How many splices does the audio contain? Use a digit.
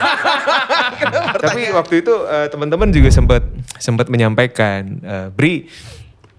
1